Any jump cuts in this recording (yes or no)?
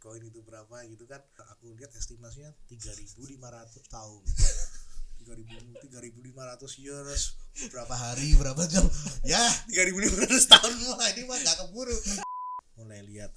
yes